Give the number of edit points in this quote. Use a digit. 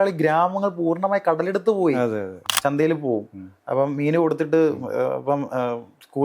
1